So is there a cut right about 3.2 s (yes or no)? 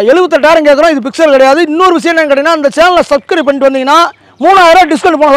no